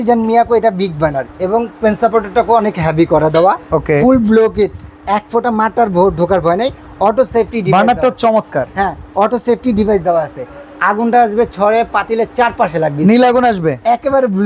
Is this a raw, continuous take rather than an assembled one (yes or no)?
yes